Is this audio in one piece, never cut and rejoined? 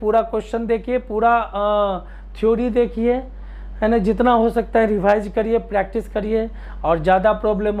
yes; 0 cuts

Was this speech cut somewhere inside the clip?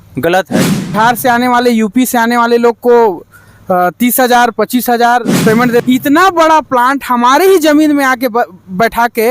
yes; 2 cuts; at 0.9 s, 5.8 s

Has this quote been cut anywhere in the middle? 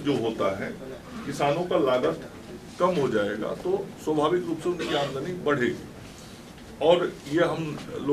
no; 0 cuts

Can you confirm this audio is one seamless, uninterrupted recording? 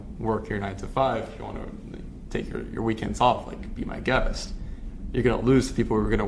yes; 0 cuts

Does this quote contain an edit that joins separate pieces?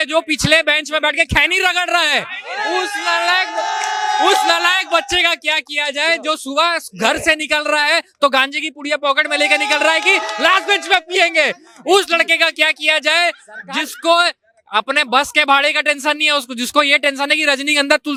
no; 0 cuts

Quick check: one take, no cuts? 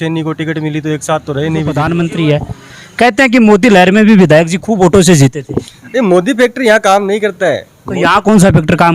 no; 1 cut; at 1.8 s

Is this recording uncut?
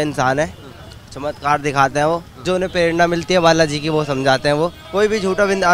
no; 2 cuts; at 2.4 s, 4.8 s

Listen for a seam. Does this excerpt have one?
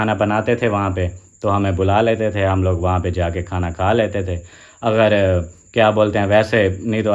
no; 0 cuts

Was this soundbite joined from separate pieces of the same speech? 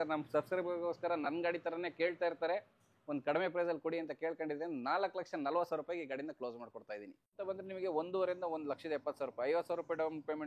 yes; 1 cut; at 7.4 s

